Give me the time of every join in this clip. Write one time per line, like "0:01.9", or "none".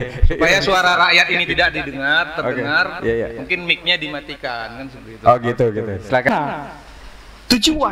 0:06.3